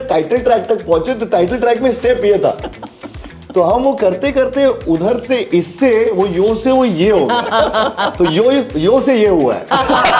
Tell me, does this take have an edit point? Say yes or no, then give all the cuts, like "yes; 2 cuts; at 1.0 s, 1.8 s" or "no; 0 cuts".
no; 0 cuts